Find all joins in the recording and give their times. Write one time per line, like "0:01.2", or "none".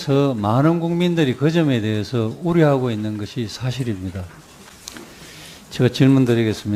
0:01.1